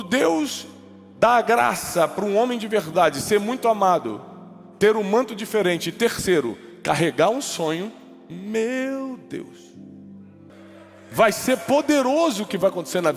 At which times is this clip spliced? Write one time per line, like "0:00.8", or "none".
0:10.5